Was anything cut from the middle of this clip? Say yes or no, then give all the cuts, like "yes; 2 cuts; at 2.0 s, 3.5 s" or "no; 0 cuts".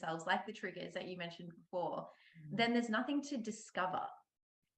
no; 0 cuts